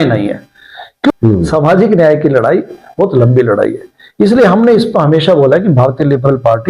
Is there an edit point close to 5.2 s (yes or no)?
no